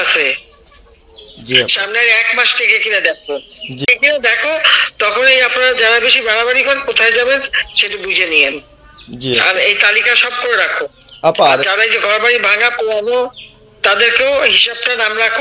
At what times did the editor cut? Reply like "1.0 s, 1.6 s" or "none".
3.8 s